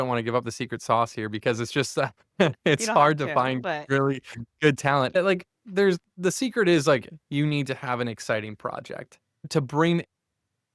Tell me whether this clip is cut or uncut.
cut